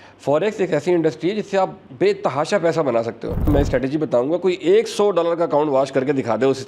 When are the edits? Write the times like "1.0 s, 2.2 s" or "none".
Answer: 1.8 s, 3.4 s